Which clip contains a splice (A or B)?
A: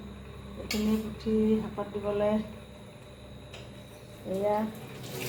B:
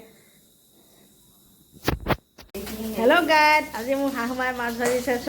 B